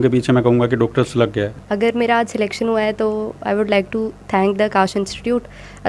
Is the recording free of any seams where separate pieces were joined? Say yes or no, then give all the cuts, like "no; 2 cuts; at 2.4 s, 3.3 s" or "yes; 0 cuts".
no; 1 cut; at 1.6 s